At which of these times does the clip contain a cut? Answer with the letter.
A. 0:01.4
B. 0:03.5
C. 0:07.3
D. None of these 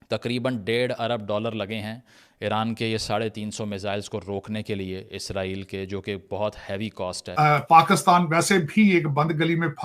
C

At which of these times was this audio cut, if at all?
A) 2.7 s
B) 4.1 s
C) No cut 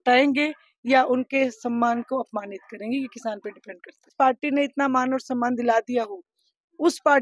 B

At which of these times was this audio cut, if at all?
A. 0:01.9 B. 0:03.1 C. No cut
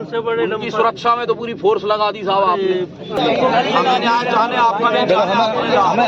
B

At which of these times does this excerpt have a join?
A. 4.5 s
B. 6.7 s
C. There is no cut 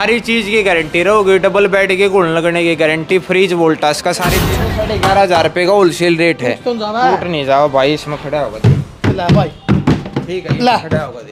A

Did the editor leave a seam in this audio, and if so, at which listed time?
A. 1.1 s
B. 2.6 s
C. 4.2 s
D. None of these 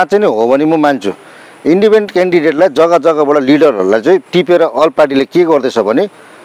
D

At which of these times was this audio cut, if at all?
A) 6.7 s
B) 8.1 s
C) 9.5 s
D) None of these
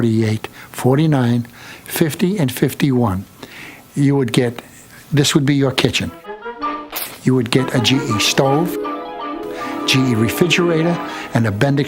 D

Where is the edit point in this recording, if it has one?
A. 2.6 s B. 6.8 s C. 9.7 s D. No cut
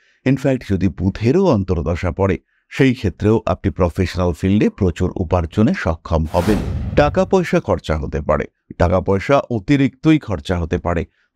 B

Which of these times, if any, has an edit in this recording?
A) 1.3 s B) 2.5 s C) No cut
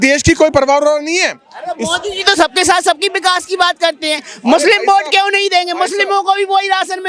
C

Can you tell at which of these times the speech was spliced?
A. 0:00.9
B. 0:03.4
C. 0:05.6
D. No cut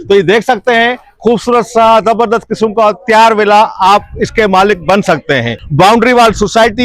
C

